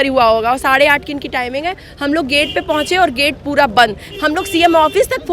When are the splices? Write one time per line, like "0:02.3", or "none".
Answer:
0:04.1